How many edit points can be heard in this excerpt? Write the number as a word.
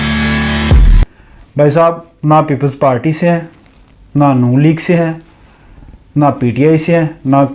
one